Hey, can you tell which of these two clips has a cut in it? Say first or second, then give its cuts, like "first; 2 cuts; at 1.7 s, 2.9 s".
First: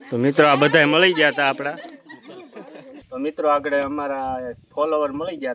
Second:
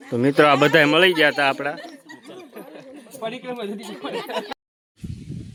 first; 1 cut; at 3.0 s